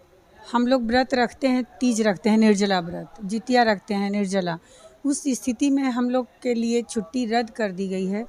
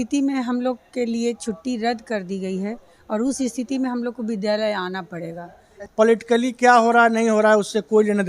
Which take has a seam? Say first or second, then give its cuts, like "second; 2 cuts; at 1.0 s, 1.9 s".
second; 1 cut; at 5.8 s